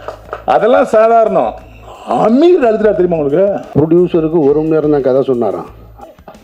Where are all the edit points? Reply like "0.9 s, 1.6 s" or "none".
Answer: 3.6 s